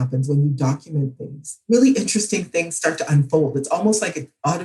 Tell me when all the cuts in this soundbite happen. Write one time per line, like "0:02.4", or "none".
none